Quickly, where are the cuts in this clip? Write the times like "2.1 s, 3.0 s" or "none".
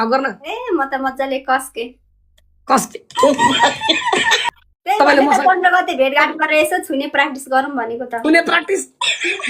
4.4 s